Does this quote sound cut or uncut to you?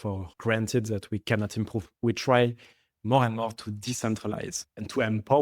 cut